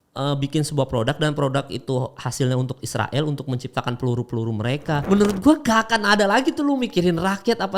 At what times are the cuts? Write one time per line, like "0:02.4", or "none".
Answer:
0:05.0